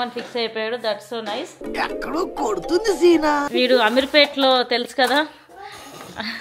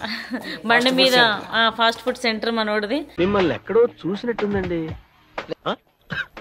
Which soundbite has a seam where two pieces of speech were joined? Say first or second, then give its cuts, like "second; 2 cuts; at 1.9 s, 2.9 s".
first; 1 cut; at 3.5 s